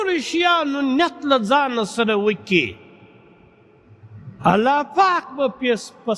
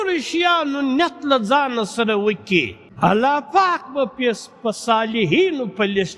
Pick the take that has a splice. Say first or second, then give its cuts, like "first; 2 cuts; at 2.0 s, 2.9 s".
second; 1 cut; at 2.8 s